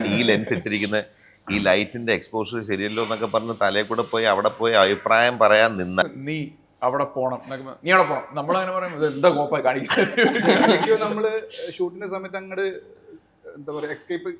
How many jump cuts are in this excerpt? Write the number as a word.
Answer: one